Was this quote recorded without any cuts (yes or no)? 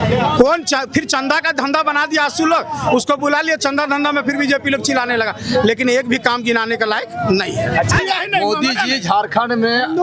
no